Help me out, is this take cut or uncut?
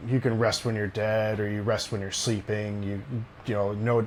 uncut